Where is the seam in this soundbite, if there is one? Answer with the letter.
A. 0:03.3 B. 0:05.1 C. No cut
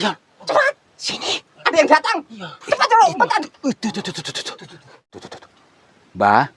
B